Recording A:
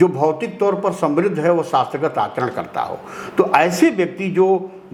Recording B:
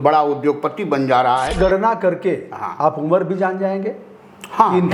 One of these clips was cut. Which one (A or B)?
B